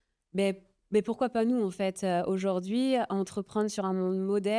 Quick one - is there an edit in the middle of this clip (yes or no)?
no